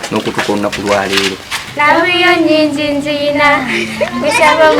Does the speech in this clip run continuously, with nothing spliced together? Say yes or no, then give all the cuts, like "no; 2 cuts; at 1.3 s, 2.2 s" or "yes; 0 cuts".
no; 1 cut; at 1.7 s